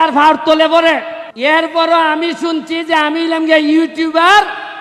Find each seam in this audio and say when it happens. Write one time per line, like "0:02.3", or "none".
0:01.2

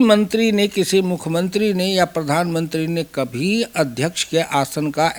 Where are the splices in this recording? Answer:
none

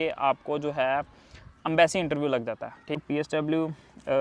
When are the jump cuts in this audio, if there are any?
0:03.0

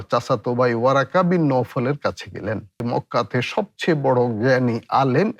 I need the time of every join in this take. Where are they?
0:02.8

